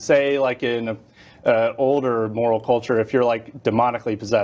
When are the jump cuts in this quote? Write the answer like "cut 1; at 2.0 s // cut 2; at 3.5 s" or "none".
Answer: cut 1; at 1.1 s